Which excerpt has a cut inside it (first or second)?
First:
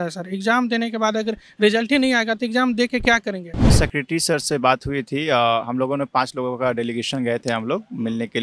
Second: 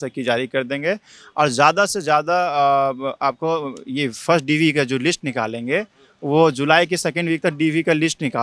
first